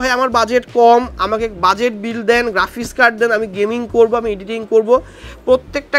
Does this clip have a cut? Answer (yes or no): no